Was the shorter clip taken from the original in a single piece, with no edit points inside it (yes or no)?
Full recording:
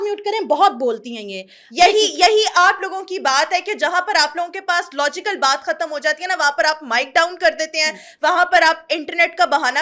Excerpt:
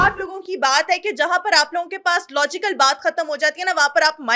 yes